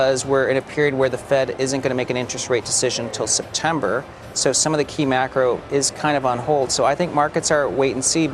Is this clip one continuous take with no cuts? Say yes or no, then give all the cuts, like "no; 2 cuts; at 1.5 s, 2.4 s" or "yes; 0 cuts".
yes; 0 cuts